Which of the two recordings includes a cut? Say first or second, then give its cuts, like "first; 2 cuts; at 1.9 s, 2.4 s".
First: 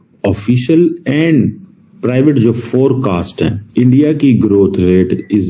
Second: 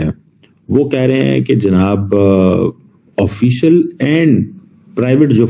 first; 1 cut; at 3.6 s